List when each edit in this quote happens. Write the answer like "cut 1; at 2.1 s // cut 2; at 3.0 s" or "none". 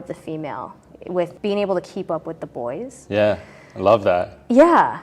cut 1; at 1.3 s

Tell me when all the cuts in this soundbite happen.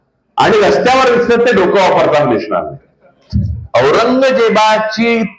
cut 1; at 3.6 s

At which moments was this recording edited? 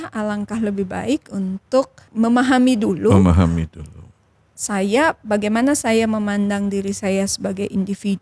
cut 1; at 2.0 s

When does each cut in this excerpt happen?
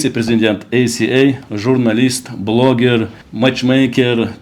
none

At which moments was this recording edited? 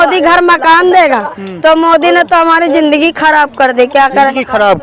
none

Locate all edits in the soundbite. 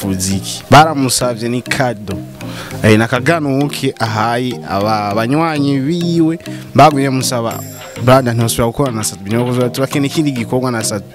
none

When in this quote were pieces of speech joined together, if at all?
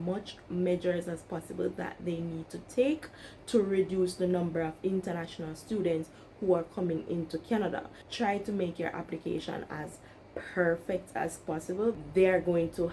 cut 1; at 8.0 s // cut 2; at 12.0 s

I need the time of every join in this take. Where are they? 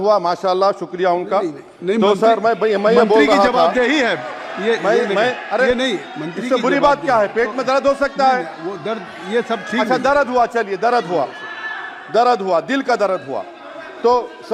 none

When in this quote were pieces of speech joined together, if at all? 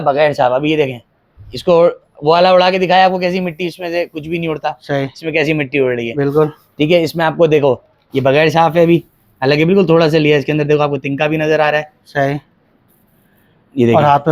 none

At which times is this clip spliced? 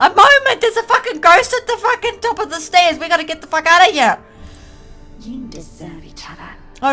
none

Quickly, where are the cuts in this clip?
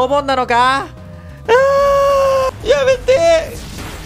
cut 1; at 2.5 s

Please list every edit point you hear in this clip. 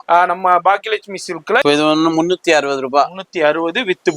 cut 1; at 1.6 s

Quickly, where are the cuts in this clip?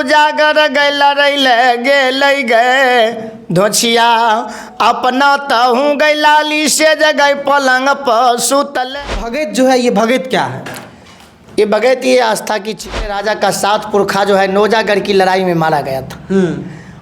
cut 1; at 9.0 s // cut 2; at 13.0 s

